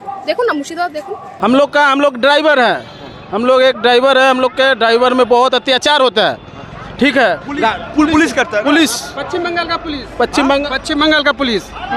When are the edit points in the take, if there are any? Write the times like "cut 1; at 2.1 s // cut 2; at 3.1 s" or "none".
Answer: cut 1; at 1.3 s